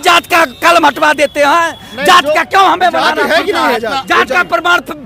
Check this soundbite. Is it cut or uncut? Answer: uncut